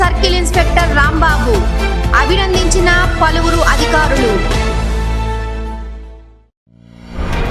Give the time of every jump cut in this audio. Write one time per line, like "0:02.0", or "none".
0:06.6